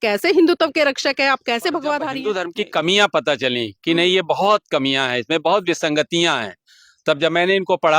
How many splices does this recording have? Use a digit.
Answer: 1